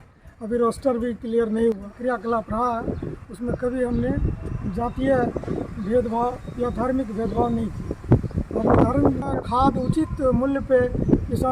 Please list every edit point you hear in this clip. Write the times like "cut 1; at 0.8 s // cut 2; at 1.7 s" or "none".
cut 1; at 1.9 s // cut 2; at 9.3 s